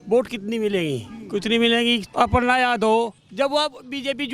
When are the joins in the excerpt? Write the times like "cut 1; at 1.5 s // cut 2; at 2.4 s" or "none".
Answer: cut 1; at 2.0 s